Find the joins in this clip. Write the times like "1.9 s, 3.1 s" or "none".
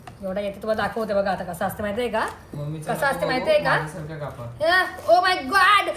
none